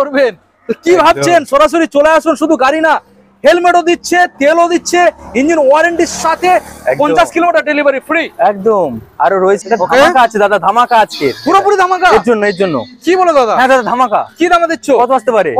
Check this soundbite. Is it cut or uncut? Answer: cut